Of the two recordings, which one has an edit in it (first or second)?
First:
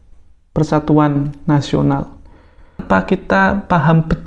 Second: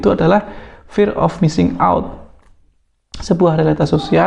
first